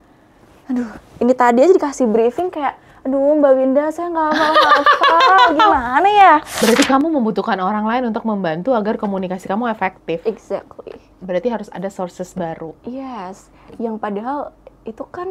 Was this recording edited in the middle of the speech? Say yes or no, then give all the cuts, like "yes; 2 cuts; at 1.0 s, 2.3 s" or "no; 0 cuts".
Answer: yes; 1 cut; at 6.5 s